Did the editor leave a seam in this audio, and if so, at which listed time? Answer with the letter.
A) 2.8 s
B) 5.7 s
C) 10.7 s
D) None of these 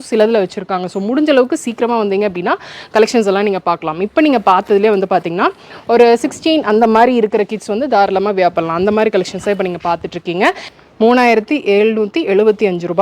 C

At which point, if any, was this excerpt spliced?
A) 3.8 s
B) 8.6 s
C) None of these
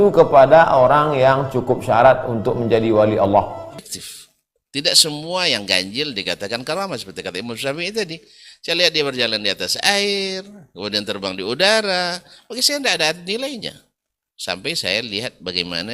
A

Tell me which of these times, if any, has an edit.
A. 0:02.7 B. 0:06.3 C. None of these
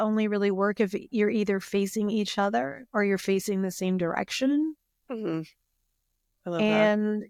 C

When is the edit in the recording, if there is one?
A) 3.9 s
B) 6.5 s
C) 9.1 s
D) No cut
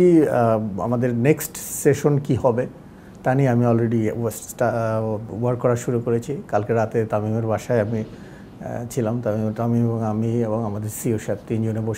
D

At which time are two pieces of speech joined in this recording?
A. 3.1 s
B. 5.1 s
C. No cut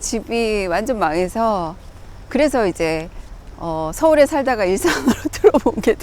C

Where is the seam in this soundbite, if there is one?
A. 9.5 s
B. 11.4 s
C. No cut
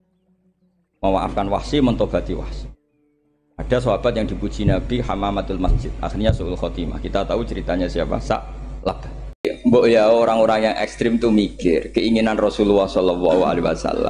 A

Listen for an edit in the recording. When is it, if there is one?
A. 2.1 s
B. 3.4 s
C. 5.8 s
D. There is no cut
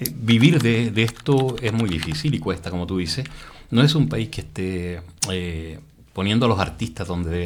D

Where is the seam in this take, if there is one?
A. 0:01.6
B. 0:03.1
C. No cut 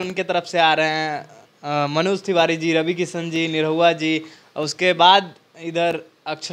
C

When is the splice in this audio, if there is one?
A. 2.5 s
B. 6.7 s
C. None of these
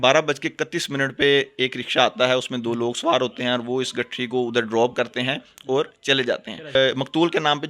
B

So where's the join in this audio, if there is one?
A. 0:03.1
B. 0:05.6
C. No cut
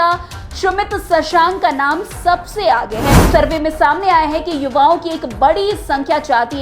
A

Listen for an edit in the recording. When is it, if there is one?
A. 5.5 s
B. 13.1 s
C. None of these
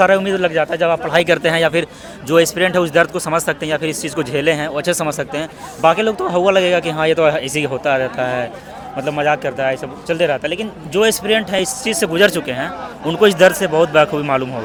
C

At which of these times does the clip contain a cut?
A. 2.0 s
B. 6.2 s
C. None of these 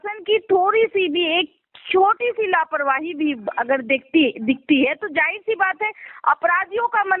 C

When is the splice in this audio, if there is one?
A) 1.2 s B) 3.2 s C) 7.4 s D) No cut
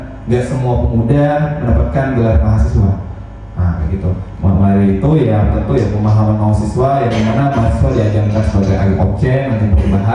D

